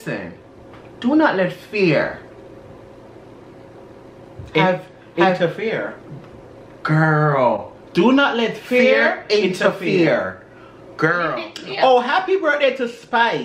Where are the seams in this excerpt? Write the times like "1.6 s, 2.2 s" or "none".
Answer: 11.5 s